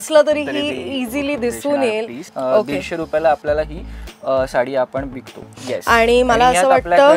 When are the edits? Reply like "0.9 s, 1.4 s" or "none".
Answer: 2.3 s, 5.6 s